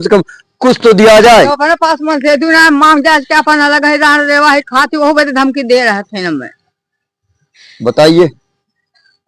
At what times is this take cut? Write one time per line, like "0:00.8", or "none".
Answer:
none

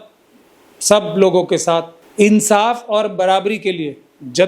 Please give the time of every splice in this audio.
0:02.0

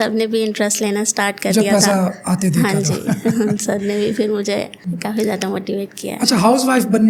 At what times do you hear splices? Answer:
none

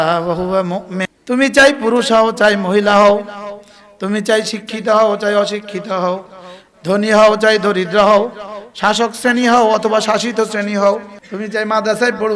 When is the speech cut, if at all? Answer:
0:01.1
0:11.2

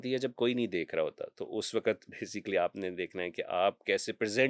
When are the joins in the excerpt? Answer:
none

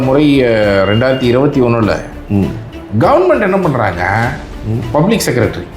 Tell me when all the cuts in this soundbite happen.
0:02.1

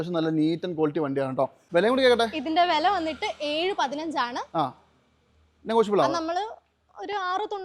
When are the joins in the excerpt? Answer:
0:01.6

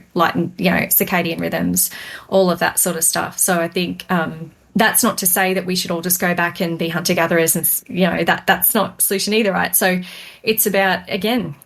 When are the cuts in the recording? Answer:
none

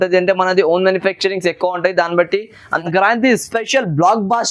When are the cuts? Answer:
0:02.8

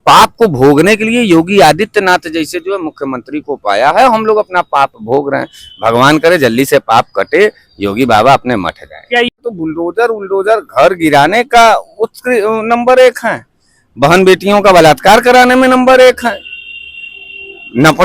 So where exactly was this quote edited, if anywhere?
0:09.4

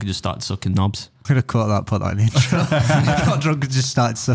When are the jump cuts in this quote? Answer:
0:01.1

